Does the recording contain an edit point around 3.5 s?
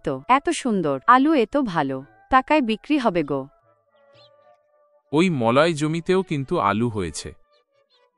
yes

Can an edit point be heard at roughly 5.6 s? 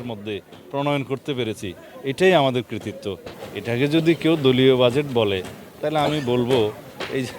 no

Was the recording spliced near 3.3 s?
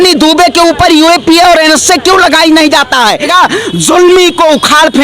yes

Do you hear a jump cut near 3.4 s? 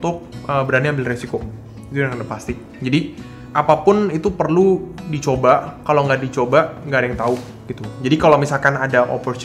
yes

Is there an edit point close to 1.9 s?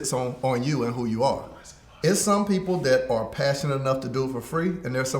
yes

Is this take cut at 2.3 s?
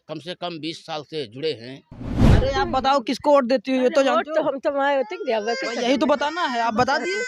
yes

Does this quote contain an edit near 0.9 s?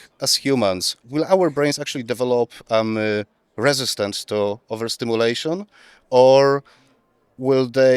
yes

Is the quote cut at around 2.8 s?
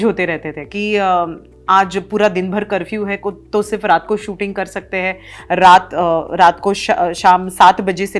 no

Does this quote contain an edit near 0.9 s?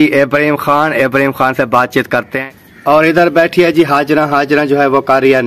no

